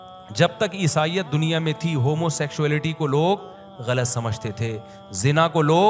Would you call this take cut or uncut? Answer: uncut